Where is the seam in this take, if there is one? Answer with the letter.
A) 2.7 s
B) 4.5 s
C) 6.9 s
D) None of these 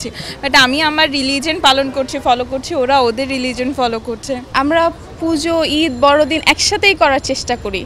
B